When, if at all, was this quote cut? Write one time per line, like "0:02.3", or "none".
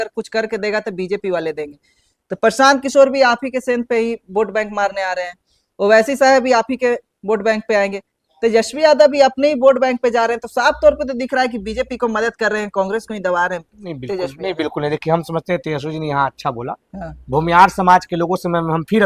none